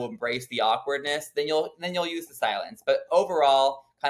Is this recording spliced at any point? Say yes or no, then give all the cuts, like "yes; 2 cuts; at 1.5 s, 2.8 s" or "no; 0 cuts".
no; 0 cuts